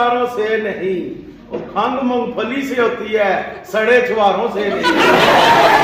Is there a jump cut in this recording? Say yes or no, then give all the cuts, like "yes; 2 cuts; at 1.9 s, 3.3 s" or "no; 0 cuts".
no; 0 cuts